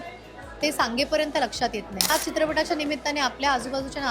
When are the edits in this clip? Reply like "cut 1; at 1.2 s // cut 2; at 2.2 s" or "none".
cut 1; at 2.1 s